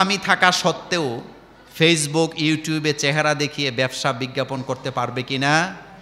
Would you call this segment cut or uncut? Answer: uncut